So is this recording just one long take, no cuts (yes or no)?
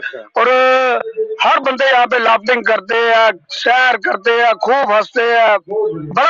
yes